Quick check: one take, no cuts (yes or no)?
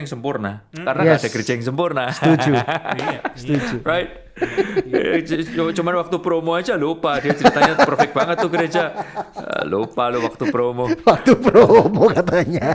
yes